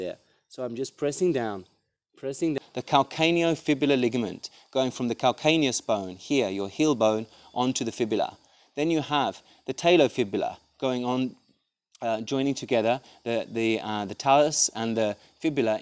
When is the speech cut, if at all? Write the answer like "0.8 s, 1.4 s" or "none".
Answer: 2.6 s